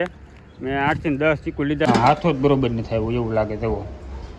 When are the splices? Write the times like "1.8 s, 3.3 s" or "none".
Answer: 1.9 s